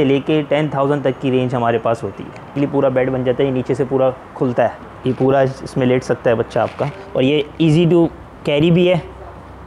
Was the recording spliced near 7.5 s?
no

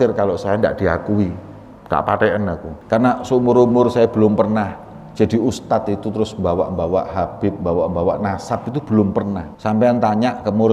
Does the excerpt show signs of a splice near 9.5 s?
yes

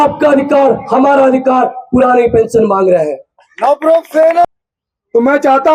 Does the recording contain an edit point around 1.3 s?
no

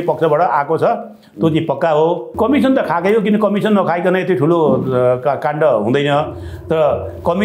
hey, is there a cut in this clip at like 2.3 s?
yes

